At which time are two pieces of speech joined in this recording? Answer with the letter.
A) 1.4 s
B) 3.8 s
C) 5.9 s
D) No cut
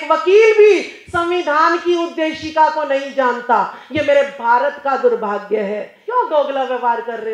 C